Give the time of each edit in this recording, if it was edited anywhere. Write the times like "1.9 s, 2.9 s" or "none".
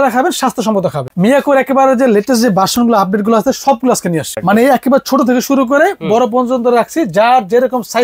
1.0 s, 4.3 s